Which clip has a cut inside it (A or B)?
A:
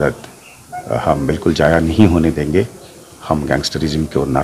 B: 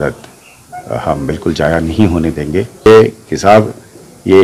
B